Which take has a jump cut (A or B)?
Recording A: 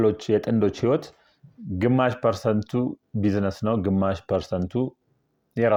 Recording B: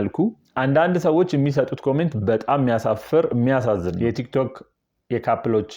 B